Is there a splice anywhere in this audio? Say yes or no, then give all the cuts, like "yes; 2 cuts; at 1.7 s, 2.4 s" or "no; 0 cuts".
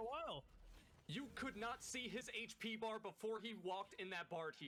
no; 0 cuts